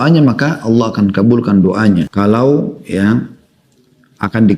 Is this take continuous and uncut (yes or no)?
no